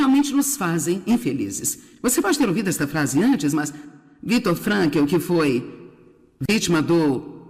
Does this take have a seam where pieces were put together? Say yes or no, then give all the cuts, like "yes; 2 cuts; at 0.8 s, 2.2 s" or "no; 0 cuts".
no; 0 cuts